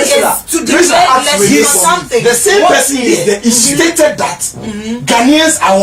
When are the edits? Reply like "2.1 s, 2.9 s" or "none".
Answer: 1.5 s